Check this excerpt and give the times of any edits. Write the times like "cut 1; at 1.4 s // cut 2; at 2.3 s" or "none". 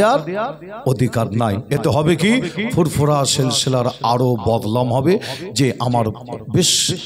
none